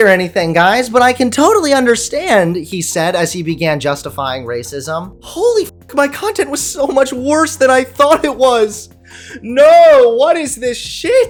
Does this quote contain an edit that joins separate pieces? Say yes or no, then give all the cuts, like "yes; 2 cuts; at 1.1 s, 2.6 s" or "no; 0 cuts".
no; 0 cuts